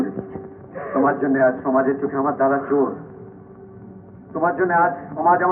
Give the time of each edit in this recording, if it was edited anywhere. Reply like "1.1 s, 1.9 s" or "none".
none